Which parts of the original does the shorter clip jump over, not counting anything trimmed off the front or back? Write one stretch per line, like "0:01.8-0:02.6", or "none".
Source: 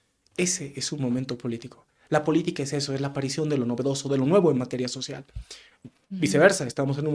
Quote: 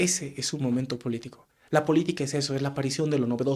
none